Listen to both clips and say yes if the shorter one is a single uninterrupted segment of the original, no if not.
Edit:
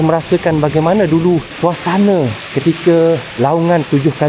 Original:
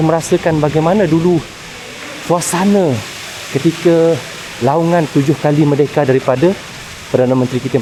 no